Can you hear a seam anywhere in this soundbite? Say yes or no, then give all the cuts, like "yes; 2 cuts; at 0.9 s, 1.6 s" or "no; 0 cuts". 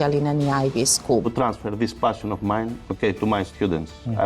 yes; 1 cut; at 1.3 s